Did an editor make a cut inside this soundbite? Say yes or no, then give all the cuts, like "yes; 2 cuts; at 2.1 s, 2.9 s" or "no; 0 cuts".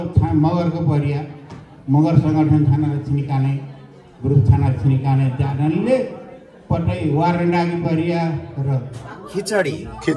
yes; 1 cut; at 9.0 s